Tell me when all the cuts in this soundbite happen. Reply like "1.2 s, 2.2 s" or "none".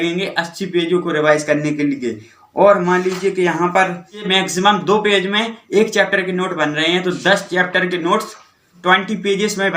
none